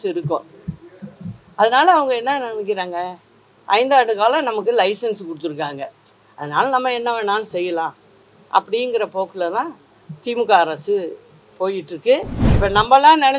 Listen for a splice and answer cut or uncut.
cut